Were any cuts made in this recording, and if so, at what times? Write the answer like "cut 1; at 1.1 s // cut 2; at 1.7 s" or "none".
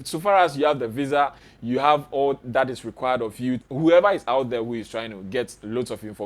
cut 1; at 3.7 s